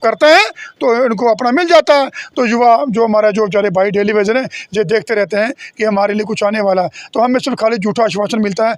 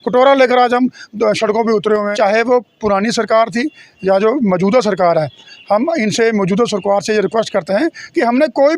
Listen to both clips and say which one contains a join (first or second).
second